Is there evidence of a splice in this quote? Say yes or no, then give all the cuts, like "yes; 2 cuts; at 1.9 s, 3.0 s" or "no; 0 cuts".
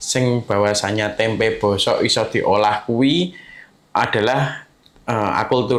no; 0 cuts